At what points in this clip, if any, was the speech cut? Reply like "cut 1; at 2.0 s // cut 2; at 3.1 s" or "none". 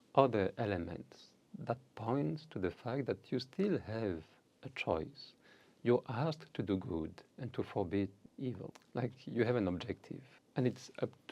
cut 1; at 8.7 s

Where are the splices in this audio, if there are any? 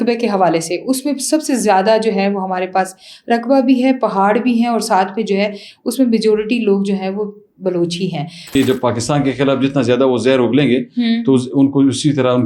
cut 1; at 8.5 s

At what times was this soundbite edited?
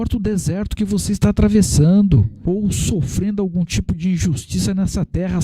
cut 1; at 2.3 s

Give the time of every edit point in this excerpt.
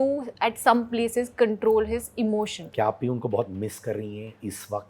cut 1; at 2.6 s

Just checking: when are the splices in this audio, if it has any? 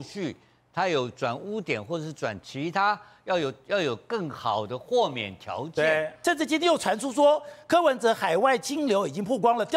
cut 1; at 6.1 s

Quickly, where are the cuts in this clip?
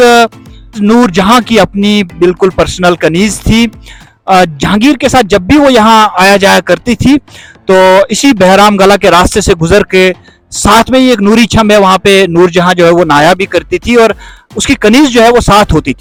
none

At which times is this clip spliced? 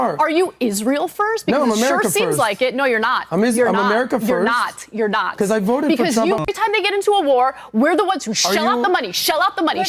cut 1; at 6.4 s

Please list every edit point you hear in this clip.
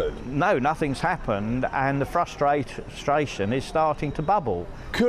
cut 1; at 2.1 s

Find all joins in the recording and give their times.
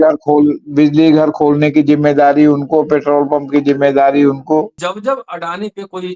cut 1; at 4.8 s

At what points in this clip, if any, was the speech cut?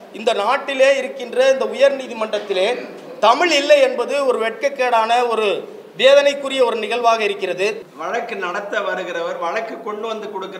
cut 1; at 7.9 s

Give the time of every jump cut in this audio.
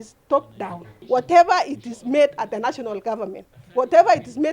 cut 1; at 0.9 s

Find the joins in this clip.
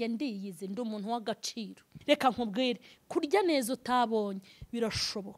cut 1; at 1.9 s

